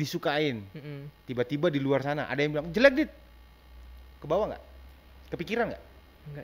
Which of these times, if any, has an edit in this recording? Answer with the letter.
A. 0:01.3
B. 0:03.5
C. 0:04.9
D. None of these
D